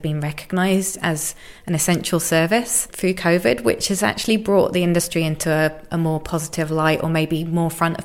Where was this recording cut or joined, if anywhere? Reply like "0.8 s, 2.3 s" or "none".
none